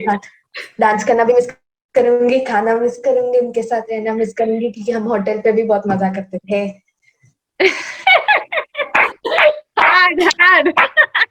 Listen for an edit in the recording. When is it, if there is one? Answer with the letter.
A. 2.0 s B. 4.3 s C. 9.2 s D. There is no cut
D